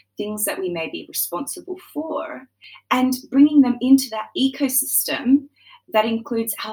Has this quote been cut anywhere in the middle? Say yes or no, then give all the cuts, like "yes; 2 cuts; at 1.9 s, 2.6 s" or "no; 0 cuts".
yes; 1 cut; at 2.7 s